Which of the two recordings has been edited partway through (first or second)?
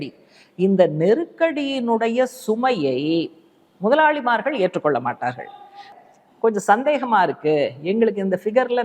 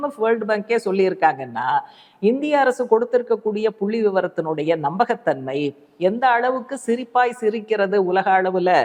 first